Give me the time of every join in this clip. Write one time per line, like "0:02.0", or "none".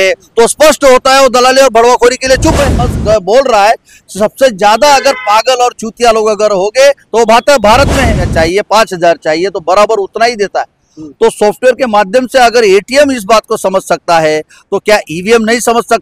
0:02.8
0:08.3